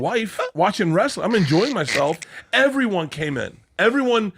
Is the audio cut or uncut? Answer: cut